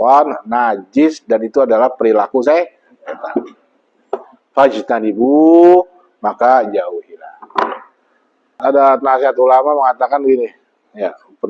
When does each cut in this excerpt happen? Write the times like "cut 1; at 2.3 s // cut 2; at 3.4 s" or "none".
cut 1; at 8.6 s